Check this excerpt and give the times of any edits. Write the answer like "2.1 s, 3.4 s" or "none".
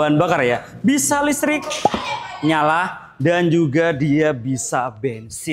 none